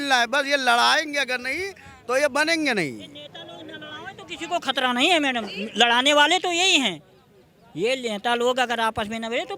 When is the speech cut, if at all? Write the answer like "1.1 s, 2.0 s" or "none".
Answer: none